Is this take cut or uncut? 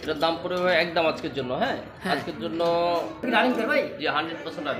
cut